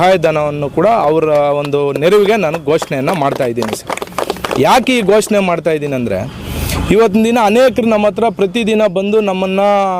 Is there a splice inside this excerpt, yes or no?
no